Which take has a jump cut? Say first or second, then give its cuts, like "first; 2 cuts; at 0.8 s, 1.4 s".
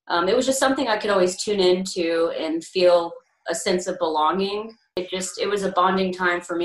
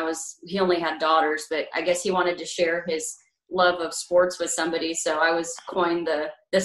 first; 1 cut; at 5.0 s